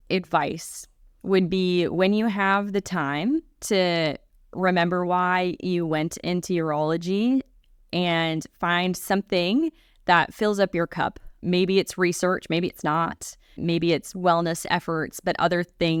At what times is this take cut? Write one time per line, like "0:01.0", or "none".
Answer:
none